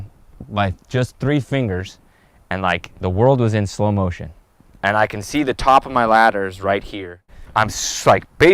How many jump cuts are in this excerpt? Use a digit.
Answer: 1